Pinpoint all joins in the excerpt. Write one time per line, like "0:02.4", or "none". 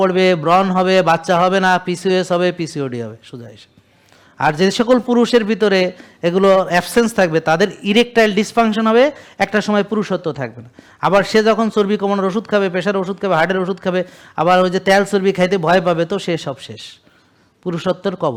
none